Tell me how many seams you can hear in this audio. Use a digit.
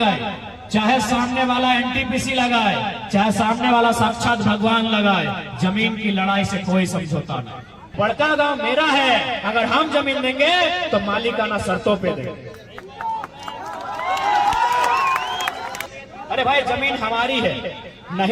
2